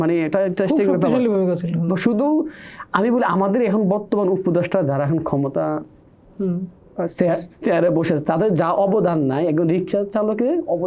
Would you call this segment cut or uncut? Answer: uncut